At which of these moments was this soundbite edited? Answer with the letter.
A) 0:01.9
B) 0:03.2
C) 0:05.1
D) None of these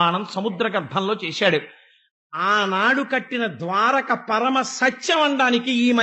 D